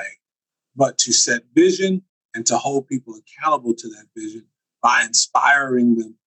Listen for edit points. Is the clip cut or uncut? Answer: uncut